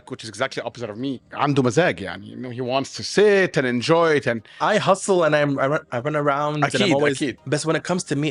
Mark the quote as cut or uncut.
cut